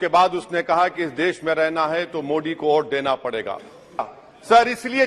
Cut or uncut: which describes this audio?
cut